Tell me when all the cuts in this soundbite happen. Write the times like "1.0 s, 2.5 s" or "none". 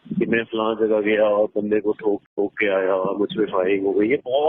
2.3 s

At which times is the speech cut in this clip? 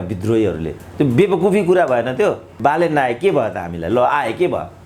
2.6 s

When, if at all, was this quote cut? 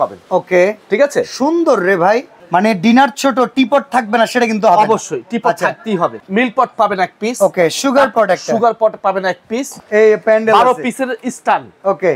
2.3 s, 6.2 s, 9.7 s

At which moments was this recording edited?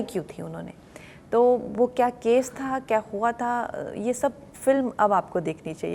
none

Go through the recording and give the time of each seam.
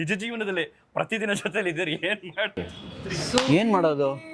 none

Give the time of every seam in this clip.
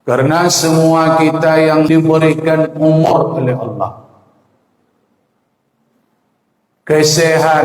1.9 s

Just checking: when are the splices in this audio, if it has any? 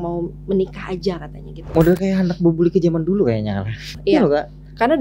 1.7 s, 4.0 s

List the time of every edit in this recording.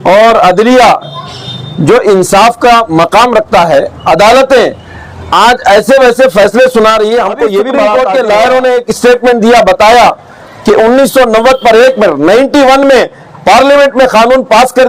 7.9 s

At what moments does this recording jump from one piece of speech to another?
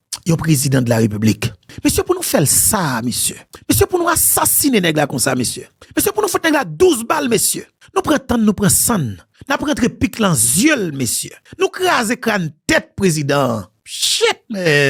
none

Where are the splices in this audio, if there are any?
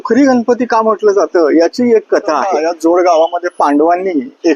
2.6 s

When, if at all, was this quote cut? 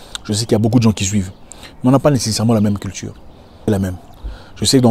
3.6 s

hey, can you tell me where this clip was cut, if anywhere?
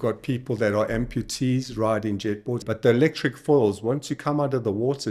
2.6 s

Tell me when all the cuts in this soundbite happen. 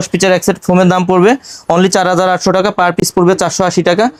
none

